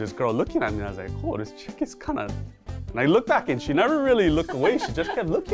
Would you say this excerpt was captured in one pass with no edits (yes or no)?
yes